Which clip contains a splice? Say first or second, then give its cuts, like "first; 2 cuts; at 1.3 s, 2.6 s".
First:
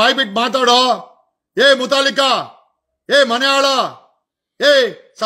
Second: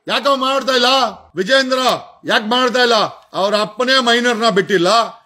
second; 1 cut; at 1.2 s